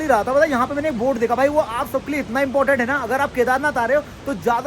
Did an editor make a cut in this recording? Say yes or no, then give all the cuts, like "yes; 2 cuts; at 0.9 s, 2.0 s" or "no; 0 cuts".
no; 0 cuts